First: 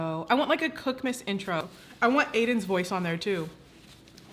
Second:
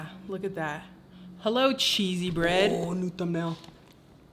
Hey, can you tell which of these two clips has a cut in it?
first; 1 cut; at 1.6 s

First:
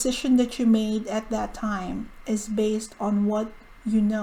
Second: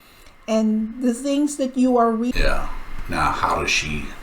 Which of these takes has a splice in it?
second; 1 cut; at 2.3 s

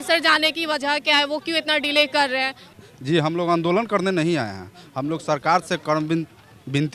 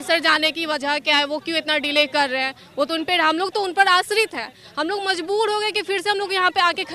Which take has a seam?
first; 1 cut; at 2.6 s

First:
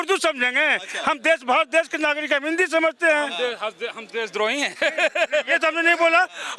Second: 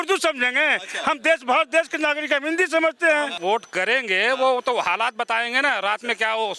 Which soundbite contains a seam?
second; 1 cut; at 3.3 s

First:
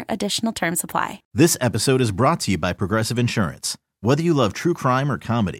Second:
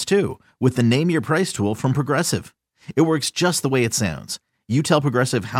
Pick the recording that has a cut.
first; 1 cut; at 1.2 s

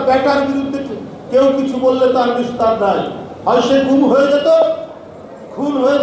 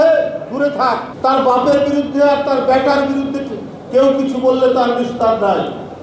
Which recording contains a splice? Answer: second; 1 cut; at 1.1 s

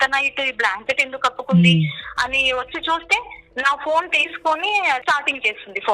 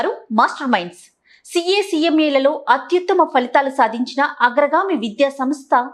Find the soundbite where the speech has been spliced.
first; 1 cut; at 5.0 s

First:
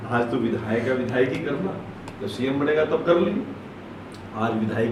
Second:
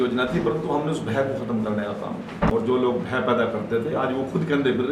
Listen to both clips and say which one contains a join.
second; 1 cut; at 2.5 s

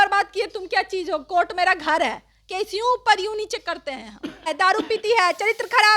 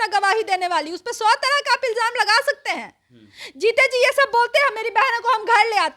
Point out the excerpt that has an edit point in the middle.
first; 1 cut; at 4.5 s

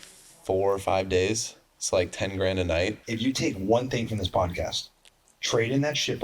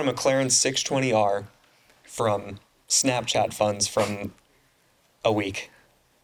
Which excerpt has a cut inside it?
first; 1 cut; at 3.0 s

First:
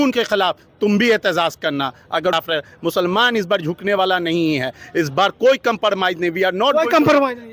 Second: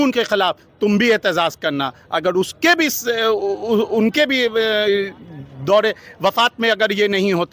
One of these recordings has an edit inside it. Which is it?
first; 1 cut; at 2.3 s

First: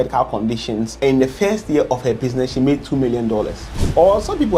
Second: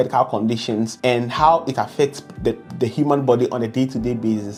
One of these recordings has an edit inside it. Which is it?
first; 2 cuts; at 0.9 s, 3.7 s

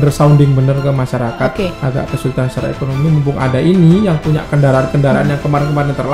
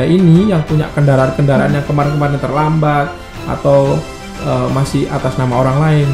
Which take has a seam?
first; 1 cut; at 1.8 s

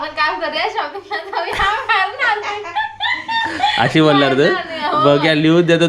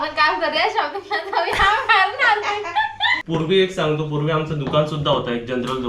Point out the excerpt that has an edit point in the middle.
second; 1 cut; at 3.2 s

